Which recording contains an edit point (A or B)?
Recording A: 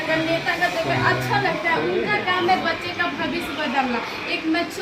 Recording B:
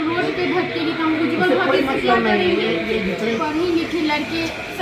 B